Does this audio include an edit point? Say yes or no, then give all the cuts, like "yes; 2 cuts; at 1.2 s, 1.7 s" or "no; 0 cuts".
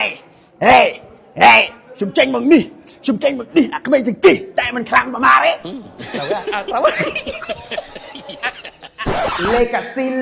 yes; 1 cut; at 8.9 s